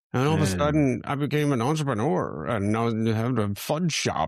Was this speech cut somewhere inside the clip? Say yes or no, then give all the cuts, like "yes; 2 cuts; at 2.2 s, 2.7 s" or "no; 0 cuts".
no; 0 cuts